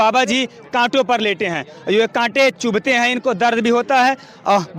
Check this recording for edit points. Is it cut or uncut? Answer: uncut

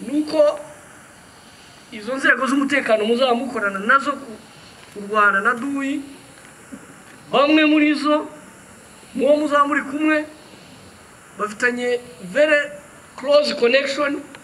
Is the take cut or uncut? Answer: uncut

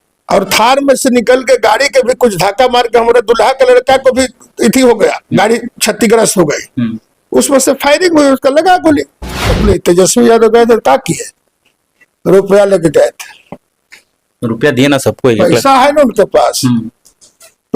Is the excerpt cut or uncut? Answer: cut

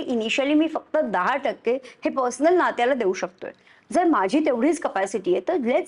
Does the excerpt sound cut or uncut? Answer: uncut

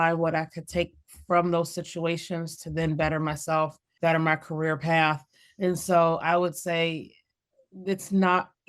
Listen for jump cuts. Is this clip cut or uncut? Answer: cut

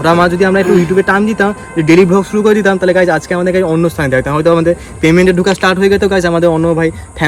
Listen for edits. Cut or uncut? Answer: uncut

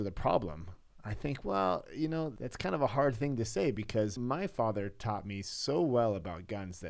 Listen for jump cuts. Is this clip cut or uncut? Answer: cut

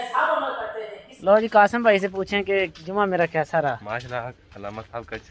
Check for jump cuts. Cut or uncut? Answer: cut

